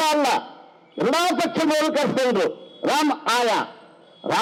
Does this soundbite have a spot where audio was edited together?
no; 0 cuts

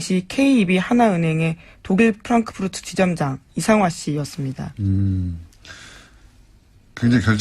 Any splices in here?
no; 0 cuts

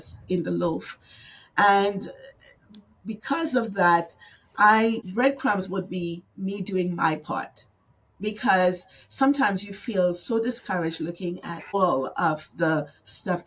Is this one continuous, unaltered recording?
no; 2 cuts; at 5.0 s, 11.7 s

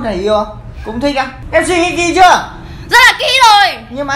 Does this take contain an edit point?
yes; 1 cut; at 1.4 s

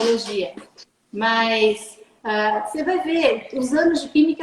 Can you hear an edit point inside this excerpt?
no; 0 cuts

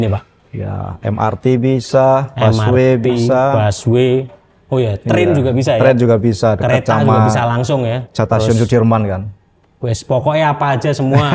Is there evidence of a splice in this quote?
no; 0 cuts

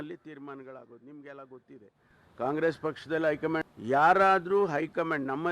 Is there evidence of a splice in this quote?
yes; 1 cut; at 3.7 s

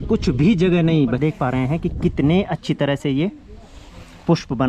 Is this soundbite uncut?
no; 1 cut; at 1.2 s

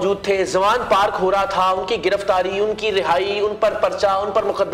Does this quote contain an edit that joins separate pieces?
no; 0 cuts

